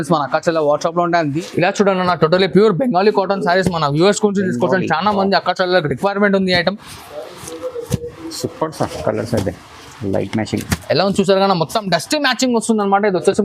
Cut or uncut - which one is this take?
cut